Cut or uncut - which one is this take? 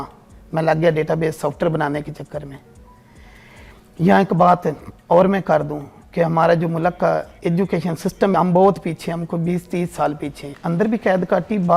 cut